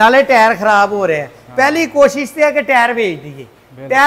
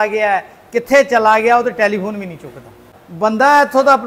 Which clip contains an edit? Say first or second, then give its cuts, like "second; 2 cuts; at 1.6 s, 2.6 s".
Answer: second; 1 cut; at 2.9 s